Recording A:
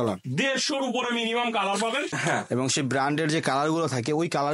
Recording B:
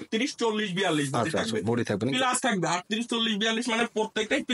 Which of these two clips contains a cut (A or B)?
A